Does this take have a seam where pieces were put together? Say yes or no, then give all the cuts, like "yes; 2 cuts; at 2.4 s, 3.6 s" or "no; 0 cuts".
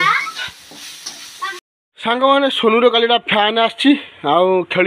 yes; 1 cut; at 1.6 s